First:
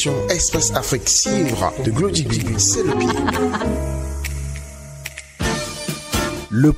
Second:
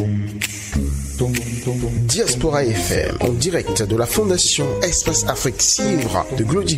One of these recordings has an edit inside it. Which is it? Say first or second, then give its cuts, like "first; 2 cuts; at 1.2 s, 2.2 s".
first; 1 cut; at 5.2 s